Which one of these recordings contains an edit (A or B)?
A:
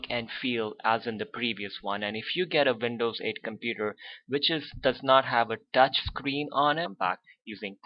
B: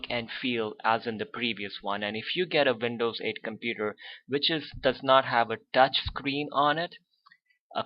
B